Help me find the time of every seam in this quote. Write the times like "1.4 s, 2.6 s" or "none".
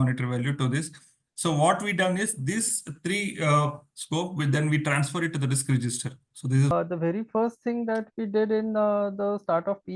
6.7 s